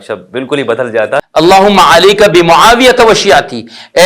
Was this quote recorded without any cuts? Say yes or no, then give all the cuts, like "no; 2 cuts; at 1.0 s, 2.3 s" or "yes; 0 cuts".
no; 1 cut; at 1.3 s